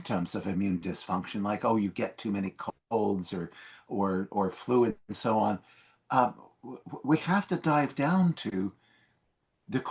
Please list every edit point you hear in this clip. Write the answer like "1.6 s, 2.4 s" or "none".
none